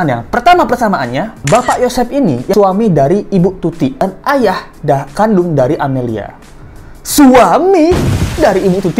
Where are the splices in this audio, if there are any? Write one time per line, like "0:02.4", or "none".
0:02.5
0:04.0